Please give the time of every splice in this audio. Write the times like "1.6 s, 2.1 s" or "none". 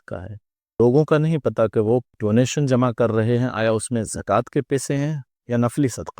0.8 s, 2.1 s, 5.3 s